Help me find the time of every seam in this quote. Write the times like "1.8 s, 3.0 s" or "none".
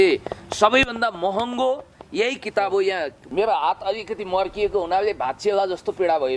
3.2 s